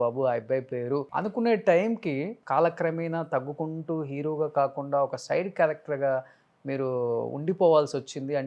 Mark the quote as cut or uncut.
cut